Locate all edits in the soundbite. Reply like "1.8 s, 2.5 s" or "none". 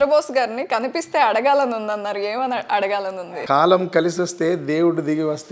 3.2 s